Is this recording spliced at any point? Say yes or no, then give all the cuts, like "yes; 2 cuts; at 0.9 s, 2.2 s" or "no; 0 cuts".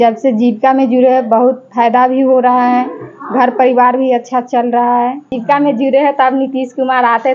yes; 1 cut; at 5.3 s